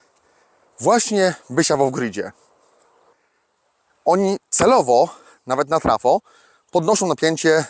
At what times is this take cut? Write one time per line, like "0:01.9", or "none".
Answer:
0:03.1